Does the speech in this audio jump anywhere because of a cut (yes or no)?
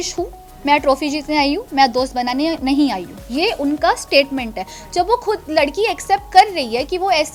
no